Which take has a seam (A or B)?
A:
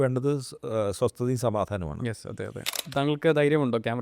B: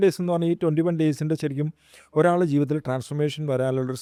A